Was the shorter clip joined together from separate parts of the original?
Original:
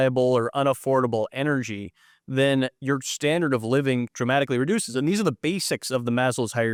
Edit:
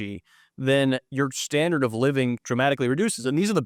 no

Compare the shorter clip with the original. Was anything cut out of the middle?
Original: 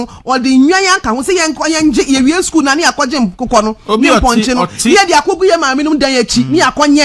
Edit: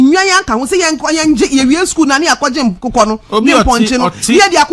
no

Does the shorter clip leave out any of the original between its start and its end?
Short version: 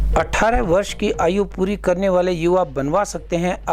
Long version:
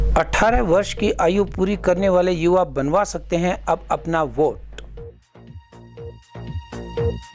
no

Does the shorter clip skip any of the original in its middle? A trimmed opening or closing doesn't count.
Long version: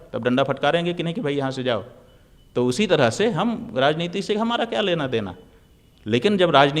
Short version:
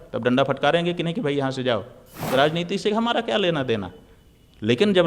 yes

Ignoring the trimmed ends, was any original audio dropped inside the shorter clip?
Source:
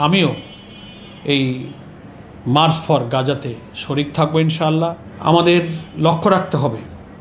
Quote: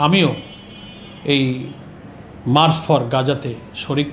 no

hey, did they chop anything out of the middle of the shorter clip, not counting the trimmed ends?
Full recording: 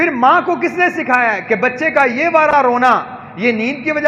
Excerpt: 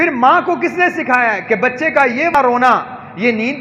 yes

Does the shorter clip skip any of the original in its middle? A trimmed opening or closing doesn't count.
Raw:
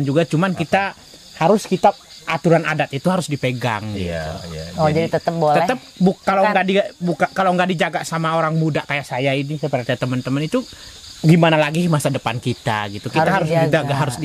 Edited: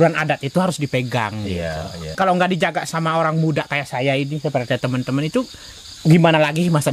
yes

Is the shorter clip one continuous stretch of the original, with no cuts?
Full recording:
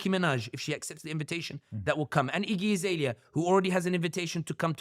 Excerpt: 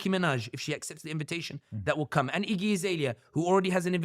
yes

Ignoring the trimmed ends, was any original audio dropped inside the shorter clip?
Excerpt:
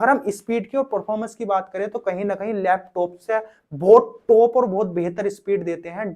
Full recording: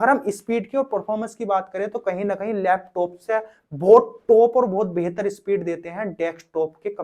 no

